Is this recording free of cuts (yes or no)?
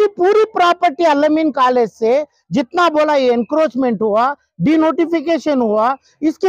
yes